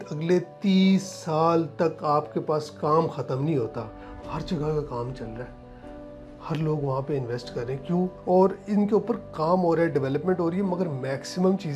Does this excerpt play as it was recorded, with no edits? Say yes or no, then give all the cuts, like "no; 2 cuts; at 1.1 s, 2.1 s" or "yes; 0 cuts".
no; 2 cuts; at 4.0 s, 8.2 s